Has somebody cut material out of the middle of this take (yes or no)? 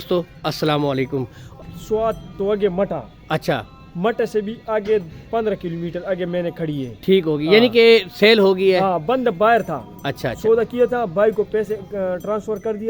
yes